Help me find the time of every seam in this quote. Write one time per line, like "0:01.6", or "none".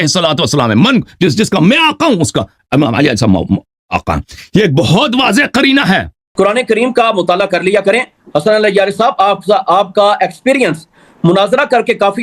0:06.2